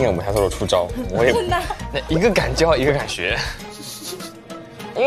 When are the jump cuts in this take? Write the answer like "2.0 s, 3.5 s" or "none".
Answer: none

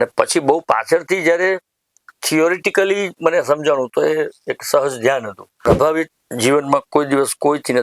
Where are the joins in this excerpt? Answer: 5.7 s

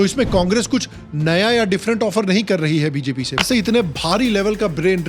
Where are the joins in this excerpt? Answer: 3.4 s

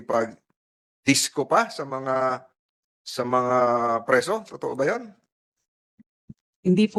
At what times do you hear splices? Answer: none

